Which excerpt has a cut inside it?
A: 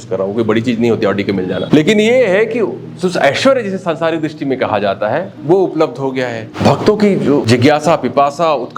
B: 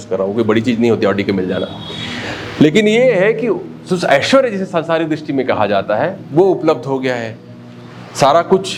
A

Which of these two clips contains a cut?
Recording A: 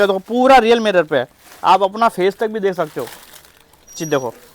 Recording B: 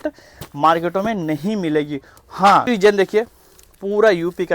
B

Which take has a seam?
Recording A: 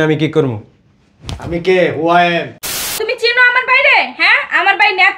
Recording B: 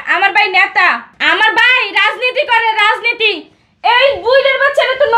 A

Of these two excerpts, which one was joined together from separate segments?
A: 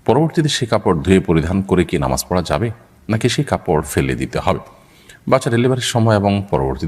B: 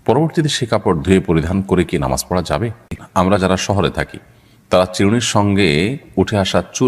B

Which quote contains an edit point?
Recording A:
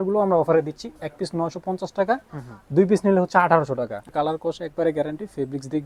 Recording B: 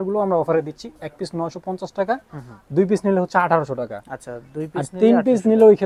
A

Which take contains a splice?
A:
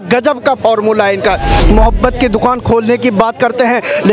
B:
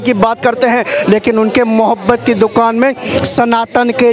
A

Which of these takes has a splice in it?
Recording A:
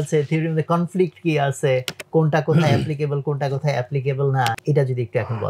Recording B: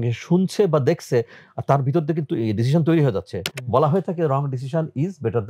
A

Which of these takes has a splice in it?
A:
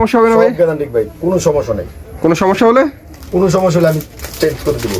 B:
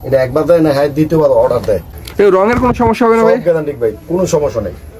B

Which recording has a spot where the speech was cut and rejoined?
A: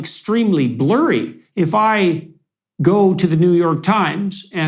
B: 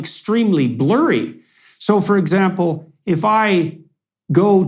A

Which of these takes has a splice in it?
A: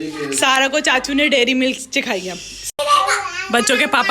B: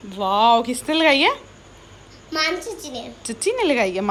A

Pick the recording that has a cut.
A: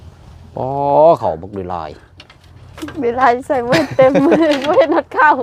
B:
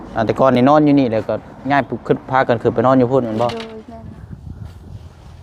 B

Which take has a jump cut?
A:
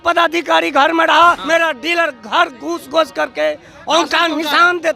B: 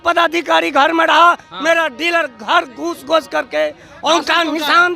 A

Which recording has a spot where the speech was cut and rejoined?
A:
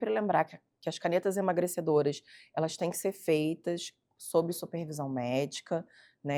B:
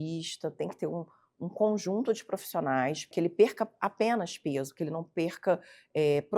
B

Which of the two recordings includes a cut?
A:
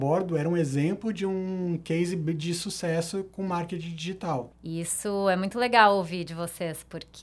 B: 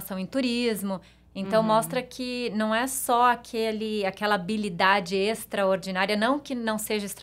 A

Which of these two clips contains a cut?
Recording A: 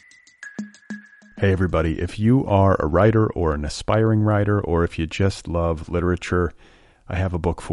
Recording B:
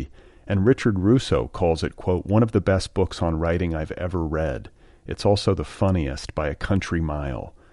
A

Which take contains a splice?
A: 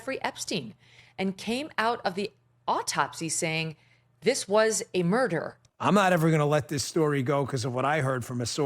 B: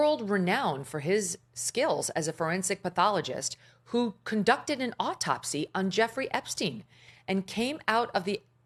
A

